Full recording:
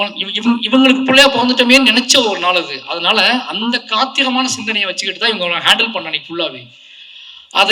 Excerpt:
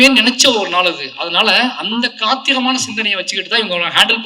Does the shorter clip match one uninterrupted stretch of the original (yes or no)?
yes